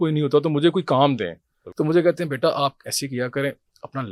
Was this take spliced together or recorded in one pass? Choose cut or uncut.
cut